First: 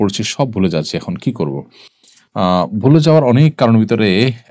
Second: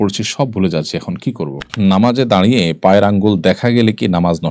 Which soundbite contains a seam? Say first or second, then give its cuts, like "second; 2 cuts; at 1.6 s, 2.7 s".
second; 1 cut; at 1.7 s